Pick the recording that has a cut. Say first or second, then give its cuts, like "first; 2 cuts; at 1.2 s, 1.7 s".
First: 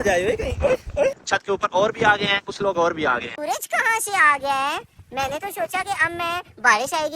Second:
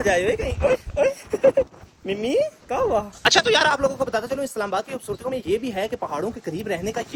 first; 2 cuts; at 1.2 s, 3.3 s